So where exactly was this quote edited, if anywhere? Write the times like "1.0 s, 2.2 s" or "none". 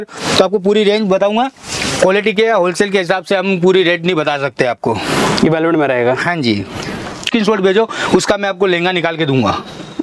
7.3 s